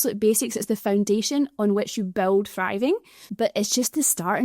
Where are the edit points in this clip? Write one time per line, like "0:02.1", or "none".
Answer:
0:03.2